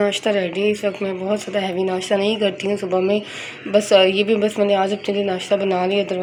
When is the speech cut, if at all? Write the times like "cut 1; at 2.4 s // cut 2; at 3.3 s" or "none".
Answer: none